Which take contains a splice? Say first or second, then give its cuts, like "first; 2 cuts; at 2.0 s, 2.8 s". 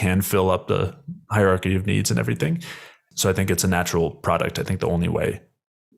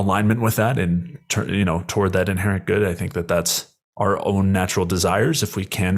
first; 1 cut; at 3.0 s